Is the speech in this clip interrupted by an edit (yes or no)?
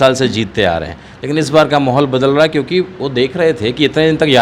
no